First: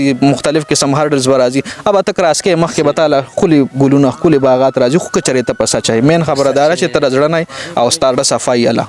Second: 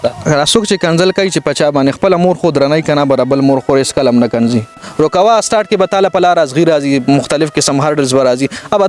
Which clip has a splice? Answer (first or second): second